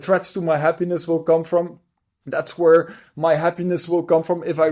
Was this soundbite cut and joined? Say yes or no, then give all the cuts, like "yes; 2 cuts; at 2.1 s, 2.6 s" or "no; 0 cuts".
no; 0 cuts